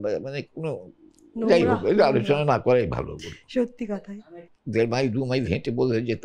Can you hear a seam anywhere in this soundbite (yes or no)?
yes